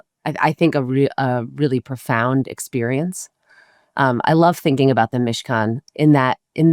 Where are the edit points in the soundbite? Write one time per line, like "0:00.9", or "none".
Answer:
none